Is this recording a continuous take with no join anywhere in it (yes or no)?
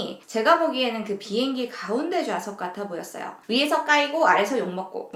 yes